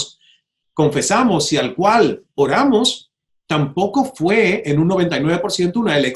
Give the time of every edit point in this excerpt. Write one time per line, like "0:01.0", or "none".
none